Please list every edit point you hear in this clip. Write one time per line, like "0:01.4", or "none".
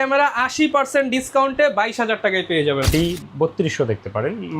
0:02.9